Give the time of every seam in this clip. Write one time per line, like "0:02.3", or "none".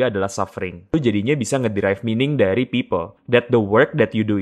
0:00.9
0:03.1